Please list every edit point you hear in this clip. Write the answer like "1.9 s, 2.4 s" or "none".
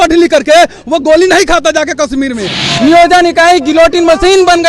2.7 s